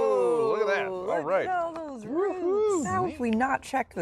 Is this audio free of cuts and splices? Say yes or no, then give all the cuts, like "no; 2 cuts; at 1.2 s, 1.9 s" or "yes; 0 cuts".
no; 1 cut; at 2.9 s